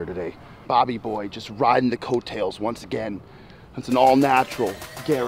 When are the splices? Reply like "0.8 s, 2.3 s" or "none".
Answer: none